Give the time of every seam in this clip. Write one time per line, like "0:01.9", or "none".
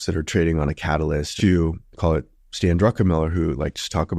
0:01.3